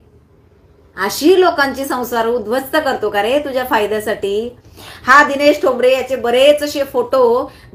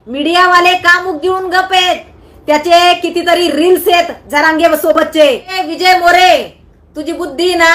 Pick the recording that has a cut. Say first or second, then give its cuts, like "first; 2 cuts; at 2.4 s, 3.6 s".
second; 1 cut; at 5.6 s